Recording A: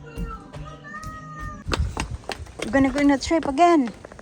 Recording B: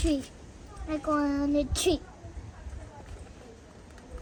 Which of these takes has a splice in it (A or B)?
A